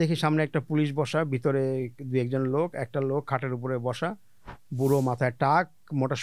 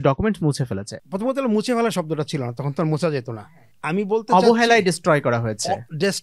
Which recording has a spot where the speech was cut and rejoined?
second; 2 cuts; at 0.9 s, 3.4 s

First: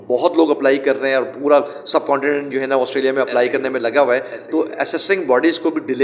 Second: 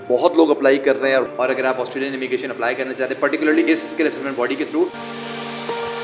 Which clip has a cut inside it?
second; 2 cuts; at 1.3 s, 5.0 s

